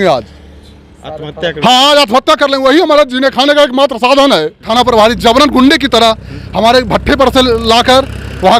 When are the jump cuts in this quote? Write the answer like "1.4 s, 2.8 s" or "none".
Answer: 4.7 s